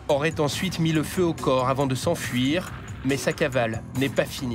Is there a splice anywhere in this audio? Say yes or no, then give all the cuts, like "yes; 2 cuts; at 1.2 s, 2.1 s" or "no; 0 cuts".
no; 0 cuts